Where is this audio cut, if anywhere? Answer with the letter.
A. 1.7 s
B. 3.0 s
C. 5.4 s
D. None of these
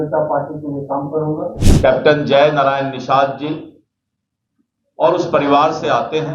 A